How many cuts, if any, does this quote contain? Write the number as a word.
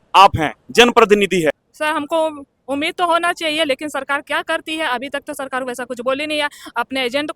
one